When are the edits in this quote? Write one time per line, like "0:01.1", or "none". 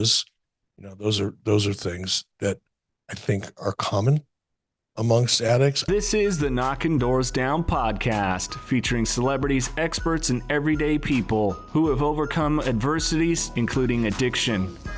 0:05.8